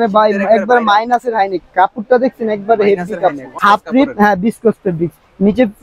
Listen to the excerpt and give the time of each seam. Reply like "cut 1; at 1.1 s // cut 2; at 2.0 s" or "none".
cut 1; at 3.5 s